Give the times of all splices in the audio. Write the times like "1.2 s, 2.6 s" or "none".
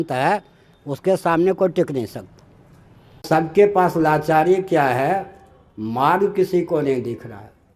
3.2 s